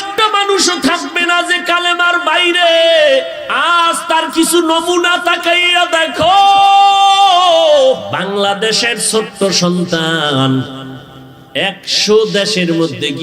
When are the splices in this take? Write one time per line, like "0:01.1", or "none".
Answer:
0:03.4
0:08.1